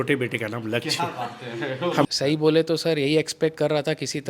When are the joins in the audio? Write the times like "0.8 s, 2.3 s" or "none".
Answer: 2.0 s